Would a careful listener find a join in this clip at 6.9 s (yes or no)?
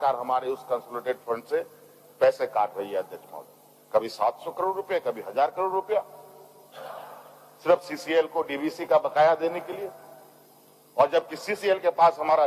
no